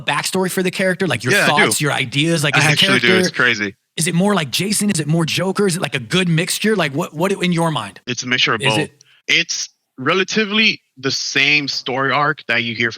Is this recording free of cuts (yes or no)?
yes